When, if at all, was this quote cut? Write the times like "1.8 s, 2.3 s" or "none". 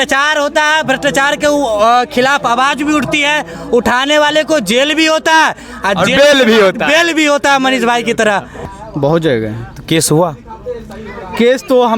8.7 s